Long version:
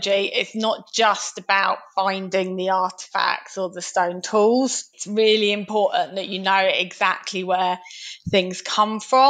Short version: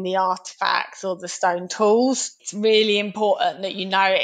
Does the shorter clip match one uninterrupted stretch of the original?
yes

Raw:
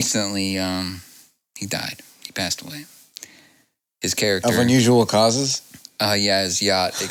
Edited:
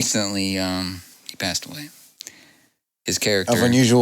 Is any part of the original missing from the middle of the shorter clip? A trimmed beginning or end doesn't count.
yes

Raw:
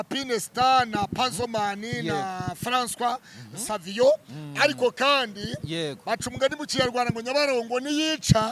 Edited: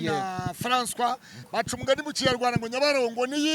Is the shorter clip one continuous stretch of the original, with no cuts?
no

